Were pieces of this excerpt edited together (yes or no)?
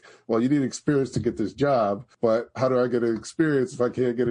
yes